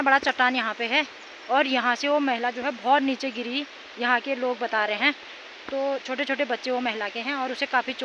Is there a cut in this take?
no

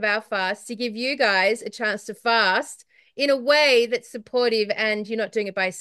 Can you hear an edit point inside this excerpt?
no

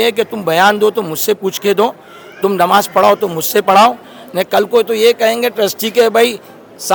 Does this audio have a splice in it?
no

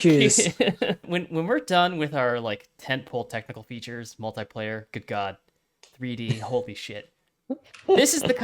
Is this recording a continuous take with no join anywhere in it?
no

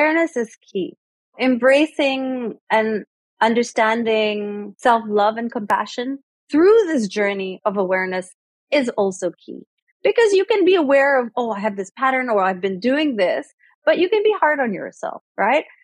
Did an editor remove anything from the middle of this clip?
yes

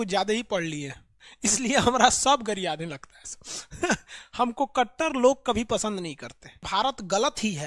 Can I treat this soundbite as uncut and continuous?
no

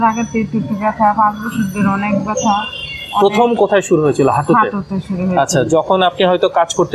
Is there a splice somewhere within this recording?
no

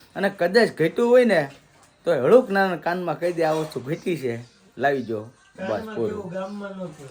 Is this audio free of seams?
yes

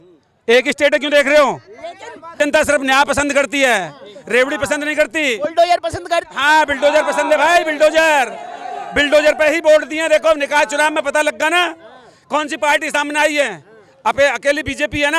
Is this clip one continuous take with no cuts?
yes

